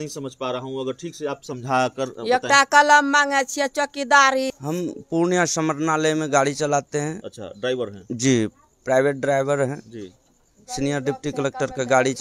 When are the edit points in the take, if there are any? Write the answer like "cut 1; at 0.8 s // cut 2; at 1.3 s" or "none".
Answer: cut 1; at 4.5 s